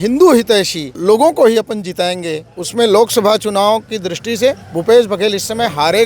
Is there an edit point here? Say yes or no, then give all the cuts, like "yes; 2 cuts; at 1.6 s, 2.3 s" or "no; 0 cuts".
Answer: yes; 1 cut; at 1.0 s